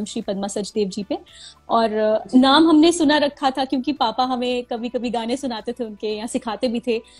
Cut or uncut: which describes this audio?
uncut